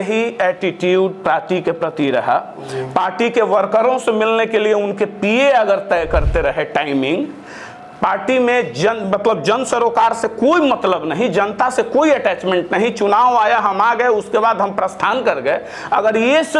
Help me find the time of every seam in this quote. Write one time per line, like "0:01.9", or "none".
none